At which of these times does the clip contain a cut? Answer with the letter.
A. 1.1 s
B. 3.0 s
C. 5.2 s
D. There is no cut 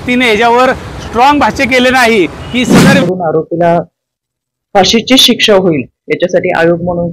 B